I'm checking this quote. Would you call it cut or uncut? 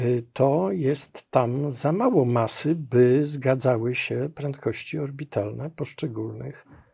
uncut